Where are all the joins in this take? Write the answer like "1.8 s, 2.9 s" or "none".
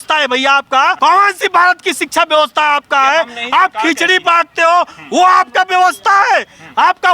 1.0 s